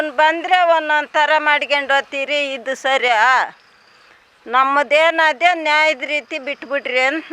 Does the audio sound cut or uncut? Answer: uncut